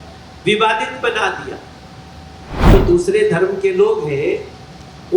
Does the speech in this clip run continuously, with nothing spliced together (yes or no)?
no